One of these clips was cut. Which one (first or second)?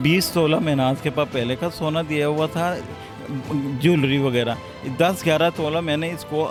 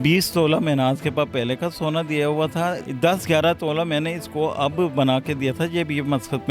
second